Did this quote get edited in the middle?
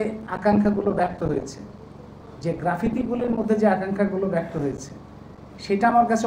no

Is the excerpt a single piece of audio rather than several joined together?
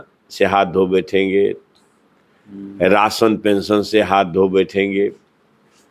yes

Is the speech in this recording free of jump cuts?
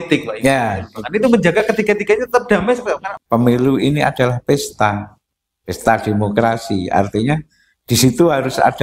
no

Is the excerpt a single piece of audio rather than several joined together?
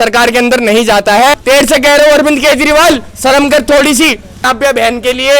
no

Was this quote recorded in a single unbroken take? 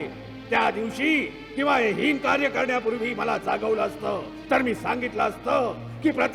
yes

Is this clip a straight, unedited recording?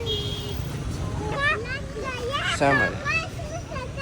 no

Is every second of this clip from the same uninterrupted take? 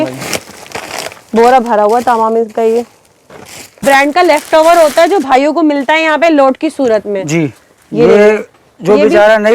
no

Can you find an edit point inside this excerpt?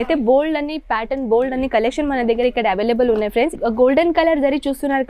yes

